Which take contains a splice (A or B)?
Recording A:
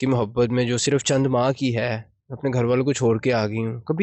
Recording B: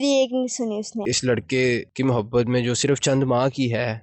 B